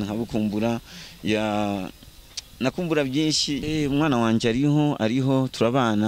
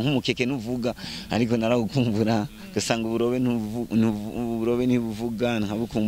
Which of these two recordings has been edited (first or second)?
first